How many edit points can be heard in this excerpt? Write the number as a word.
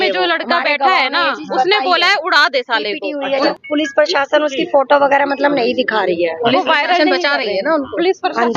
one